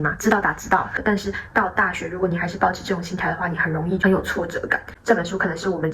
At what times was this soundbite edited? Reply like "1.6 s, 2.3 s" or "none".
1.0 s, 4.9 s